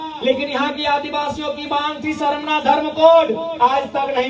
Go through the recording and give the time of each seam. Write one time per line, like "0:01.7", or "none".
none